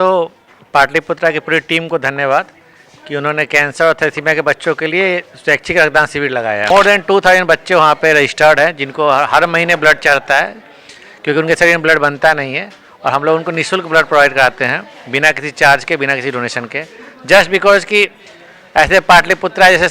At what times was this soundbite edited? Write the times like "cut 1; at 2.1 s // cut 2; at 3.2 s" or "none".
cut 1; at 6.7 s